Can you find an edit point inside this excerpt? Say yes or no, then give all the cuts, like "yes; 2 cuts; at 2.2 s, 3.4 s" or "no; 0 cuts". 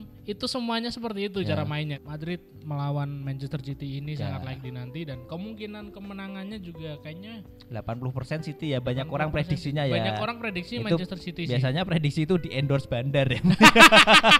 yes; 1 cut; at 1.9 s